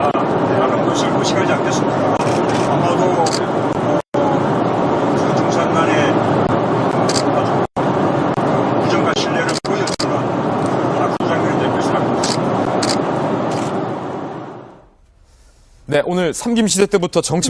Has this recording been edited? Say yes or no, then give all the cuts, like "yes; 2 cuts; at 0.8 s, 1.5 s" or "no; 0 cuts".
no; 0 cuts